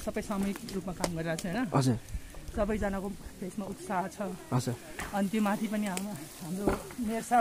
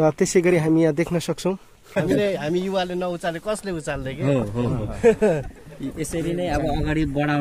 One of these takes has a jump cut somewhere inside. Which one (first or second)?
second